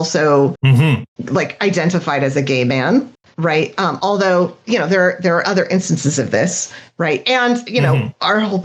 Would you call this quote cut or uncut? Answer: cut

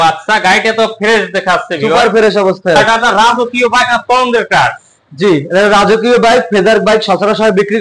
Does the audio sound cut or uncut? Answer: cut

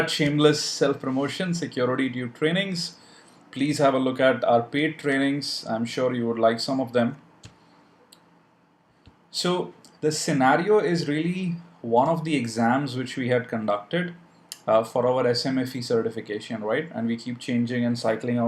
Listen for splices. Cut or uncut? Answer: cut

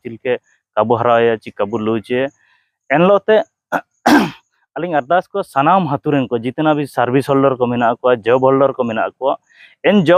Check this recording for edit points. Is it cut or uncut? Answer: uncut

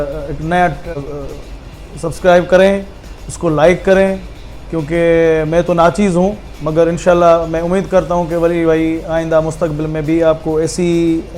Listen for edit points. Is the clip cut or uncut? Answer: cut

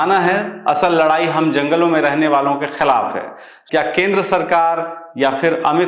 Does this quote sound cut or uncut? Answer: cut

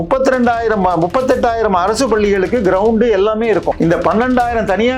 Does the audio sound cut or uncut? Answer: cut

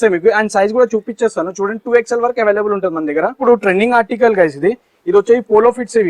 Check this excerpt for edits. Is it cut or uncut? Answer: cut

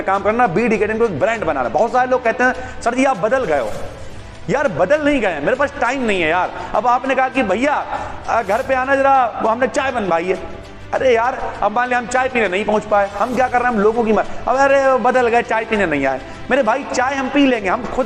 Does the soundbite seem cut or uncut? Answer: uncut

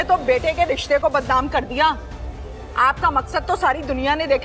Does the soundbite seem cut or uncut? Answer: uncut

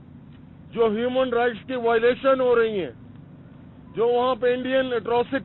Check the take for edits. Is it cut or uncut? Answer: uncut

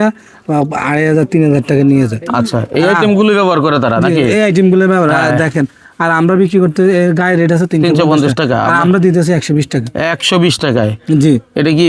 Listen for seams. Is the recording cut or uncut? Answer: uncut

